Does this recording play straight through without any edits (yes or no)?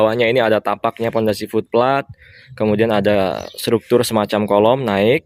yes